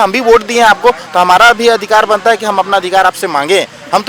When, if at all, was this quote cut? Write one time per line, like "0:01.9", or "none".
none